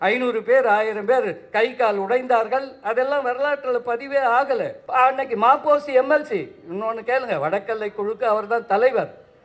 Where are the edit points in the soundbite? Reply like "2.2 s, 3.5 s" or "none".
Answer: 4.8 s